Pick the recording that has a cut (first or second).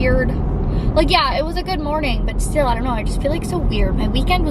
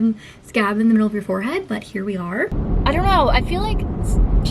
second